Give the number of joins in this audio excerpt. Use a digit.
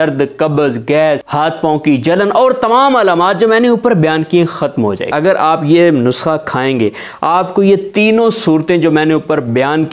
2